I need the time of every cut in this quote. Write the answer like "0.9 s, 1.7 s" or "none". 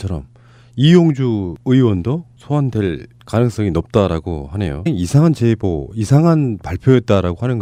none